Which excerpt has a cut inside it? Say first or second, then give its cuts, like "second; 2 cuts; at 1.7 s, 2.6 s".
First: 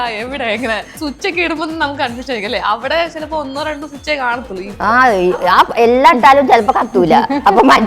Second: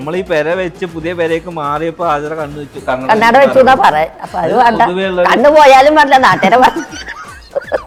first; 2 cuts; at 1.0 s, 4.7 s